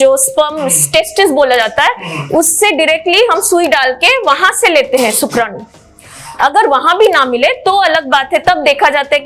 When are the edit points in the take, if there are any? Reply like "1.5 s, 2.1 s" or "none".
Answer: none